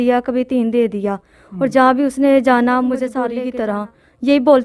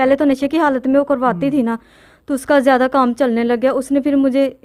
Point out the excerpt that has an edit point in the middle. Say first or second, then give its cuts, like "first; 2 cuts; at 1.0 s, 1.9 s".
first; 1 cut; at 3.2 s